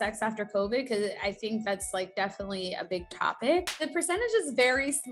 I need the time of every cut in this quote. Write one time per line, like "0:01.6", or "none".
0:03.7